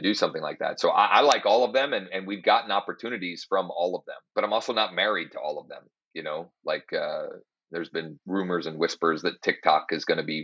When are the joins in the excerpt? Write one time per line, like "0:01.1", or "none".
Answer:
0:04.1
0:08.2